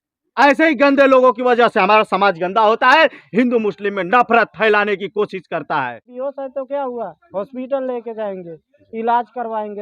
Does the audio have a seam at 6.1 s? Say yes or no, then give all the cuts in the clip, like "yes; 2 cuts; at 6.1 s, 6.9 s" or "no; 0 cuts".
yes; 1 cut; at 6.1 s